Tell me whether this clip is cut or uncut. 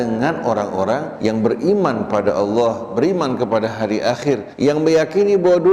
cut